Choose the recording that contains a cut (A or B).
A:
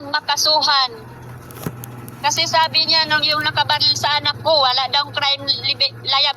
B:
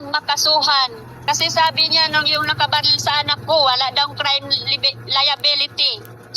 B